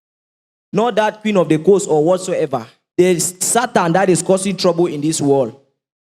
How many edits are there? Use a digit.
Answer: 1